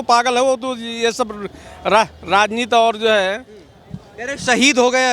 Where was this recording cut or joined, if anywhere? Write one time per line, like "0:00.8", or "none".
none